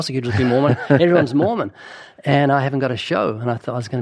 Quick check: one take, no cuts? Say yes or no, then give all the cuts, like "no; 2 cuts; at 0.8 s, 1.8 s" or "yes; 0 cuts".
yes; 0 cuts